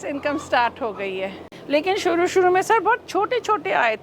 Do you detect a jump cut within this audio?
yes; 1 cut; at 1.5 s

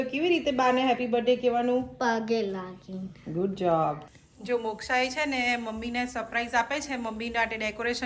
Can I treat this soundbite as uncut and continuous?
no; 1 cut; at 4.0 s

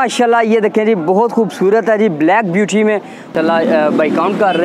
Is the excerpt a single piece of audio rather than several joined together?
no; 1 cut; at 3.3 s

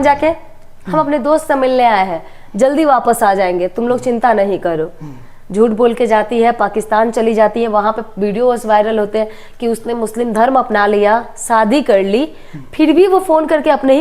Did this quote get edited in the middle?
no; 0 cuts

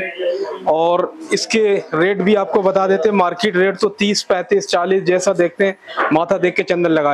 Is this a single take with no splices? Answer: yes; 0 cuts

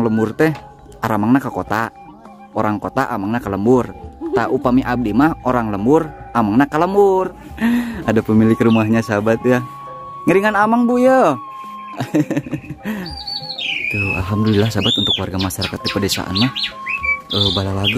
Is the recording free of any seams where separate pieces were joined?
no; 1 cut; at 7.4 s

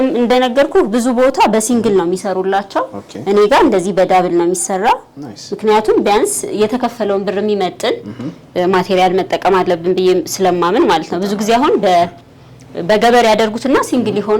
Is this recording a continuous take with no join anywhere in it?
yes; 0 cuts

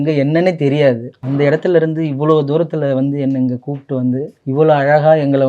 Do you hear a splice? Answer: yes; 2 cuts; at 1.1 s, 4.3 s

